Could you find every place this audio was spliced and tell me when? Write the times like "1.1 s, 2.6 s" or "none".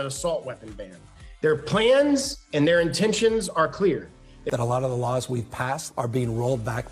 4.4 s